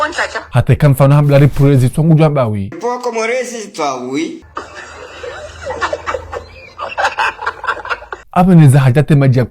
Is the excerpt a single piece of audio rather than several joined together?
no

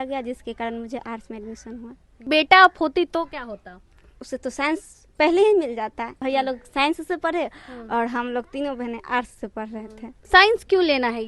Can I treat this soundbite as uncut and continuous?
no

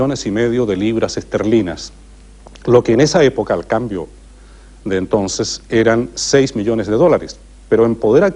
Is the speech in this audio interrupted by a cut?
yes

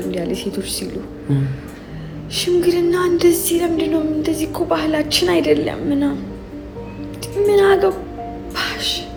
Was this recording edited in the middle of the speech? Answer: no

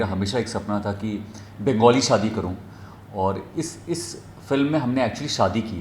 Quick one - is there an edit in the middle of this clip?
no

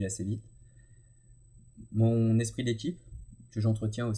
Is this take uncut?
yes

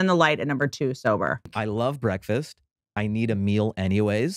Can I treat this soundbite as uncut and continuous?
no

